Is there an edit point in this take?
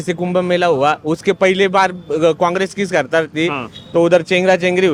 no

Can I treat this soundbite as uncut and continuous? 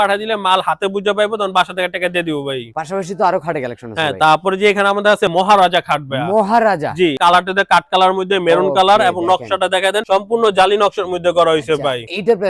yes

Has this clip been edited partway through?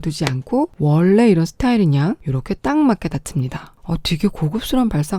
no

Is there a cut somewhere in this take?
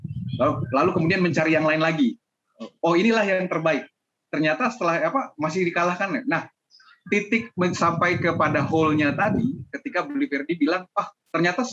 no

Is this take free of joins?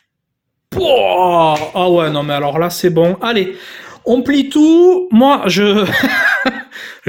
yes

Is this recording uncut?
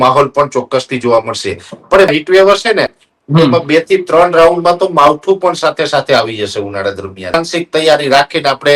no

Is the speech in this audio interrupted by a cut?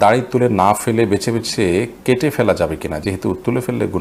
no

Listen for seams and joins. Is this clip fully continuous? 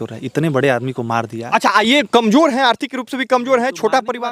yes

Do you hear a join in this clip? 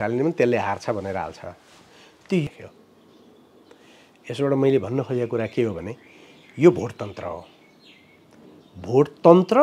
yes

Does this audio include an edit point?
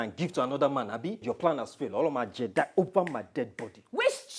yes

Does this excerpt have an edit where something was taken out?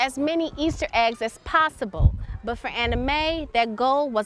no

